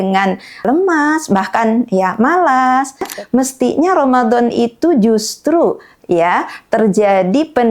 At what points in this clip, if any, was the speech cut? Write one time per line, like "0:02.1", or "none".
0:03.1